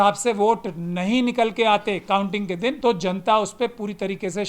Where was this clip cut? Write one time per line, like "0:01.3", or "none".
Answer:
0:02.8